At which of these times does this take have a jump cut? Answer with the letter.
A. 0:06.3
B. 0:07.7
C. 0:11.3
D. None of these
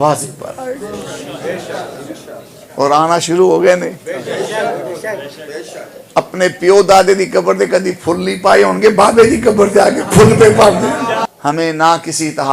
C